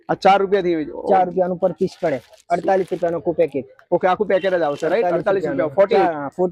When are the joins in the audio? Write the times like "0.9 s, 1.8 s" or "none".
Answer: none